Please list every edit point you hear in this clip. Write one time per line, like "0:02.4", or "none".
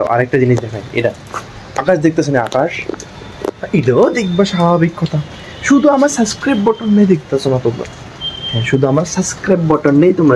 none